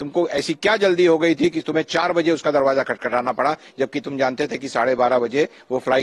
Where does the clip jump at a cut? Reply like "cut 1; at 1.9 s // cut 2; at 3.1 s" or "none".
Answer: none